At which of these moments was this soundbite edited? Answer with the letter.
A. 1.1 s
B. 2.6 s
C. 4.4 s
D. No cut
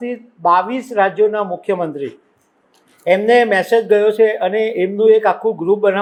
D